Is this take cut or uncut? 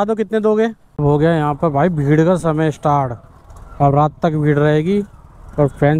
cut